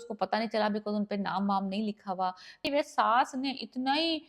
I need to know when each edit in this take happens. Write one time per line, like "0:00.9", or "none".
0:02.6